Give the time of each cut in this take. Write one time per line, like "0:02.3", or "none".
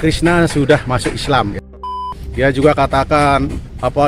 0:02.0